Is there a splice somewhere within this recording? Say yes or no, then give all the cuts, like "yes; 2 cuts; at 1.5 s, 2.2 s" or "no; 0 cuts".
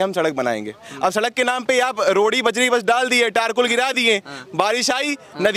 no; 0 cuts